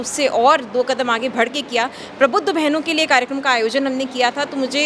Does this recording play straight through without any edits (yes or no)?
yes